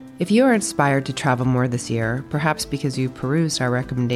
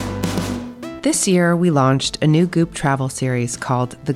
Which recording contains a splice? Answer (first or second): second